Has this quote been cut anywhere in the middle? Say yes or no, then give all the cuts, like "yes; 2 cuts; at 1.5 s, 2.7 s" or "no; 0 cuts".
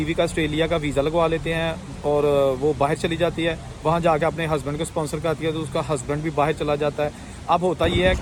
no; 0 cuts